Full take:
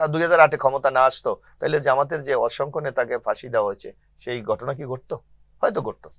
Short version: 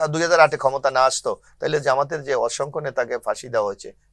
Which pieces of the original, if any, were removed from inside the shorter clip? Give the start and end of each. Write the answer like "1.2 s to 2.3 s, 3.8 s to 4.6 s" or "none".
none